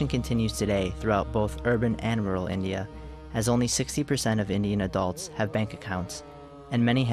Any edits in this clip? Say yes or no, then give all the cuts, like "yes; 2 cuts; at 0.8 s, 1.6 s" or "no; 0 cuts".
yes; 1 cut; at 5.2 s